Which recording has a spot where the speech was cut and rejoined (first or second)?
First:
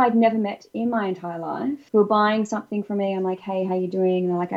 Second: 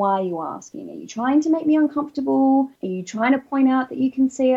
second